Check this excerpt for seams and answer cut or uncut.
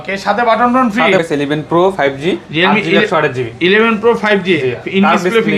cut